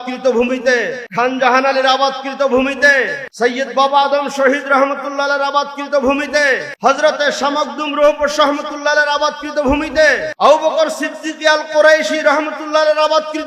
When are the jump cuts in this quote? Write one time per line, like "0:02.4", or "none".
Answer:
0:01.0
0:03.2
0:06.7
0:10.3